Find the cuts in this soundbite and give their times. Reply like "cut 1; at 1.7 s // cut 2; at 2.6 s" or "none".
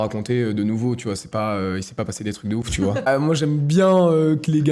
cut 1; at 3.1 s

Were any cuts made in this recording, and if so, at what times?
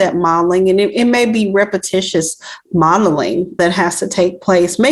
none

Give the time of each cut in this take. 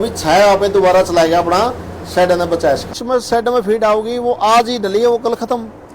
cut 1; at 3.0 s

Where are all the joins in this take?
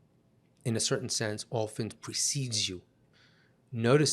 cut 1; at 3.1 s

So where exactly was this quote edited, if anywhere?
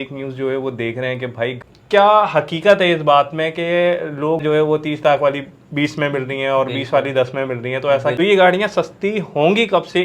cut 1; at 1.5 s // cut 2; at 4.4 s // cut 3; at 8.2 s

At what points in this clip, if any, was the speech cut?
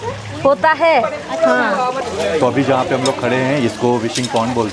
none

